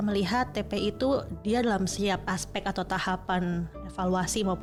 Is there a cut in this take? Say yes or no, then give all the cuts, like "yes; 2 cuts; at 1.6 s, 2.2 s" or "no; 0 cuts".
no; 0 cuts